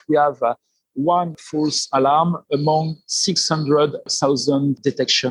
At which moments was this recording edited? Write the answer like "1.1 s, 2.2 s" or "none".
none